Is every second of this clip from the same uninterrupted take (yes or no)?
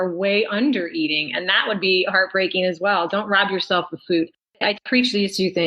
no